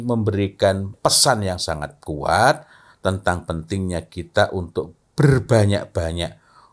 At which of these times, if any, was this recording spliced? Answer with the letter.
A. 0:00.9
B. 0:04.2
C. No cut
A